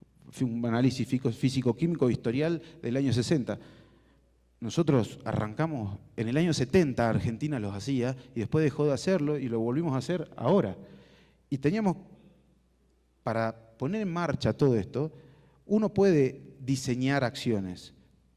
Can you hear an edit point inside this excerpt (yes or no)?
yes